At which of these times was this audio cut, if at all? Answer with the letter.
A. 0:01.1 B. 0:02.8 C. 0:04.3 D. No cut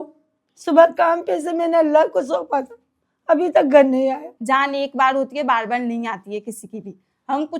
C